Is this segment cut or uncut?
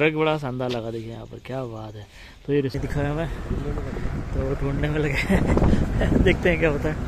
cut